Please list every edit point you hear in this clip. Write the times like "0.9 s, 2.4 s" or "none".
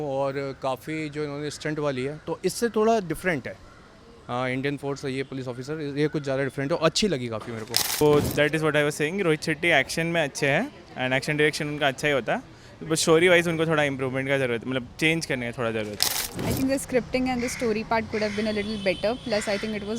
7.8 s, 16.1 s